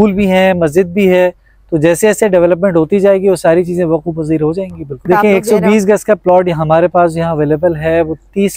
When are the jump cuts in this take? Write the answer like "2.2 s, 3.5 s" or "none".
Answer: 5.1 s